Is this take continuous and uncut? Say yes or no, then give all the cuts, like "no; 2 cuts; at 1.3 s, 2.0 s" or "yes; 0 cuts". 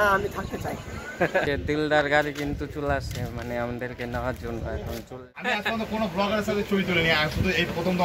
no; 2 cuts; at 1.6 s, 5.2 s